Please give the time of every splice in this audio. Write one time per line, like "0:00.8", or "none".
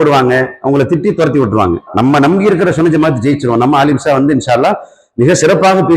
0:01.9